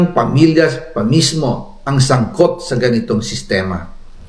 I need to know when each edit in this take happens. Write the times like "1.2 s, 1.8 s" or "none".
2.6 s